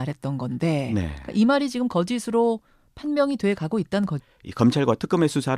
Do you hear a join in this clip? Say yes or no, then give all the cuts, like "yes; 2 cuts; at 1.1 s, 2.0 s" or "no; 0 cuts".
no; 0 cuts